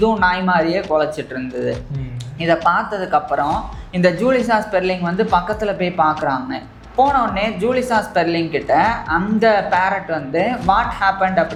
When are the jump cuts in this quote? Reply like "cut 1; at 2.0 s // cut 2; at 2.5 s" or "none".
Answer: none